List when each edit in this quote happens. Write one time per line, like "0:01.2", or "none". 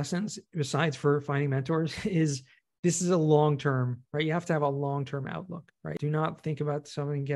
0:06.0